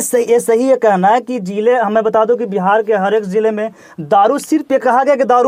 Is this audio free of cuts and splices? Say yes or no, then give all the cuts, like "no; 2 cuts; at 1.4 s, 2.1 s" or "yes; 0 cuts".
yes; 0 cuts